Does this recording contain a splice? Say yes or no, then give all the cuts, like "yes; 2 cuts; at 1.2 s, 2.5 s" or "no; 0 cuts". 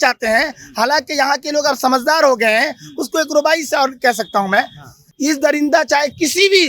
yes; 1 cut; at 5.1 s